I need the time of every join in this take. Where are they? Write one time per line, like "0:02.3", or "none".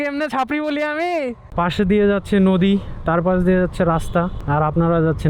0:01.4
0:04.4